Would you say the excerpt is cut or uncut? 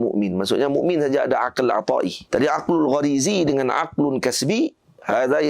cut